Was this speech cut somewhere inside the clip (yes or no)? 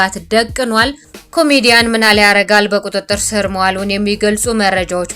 yes